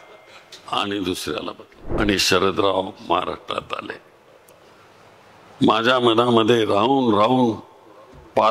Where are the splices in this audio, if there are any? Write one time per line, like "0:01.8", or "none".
0:02.0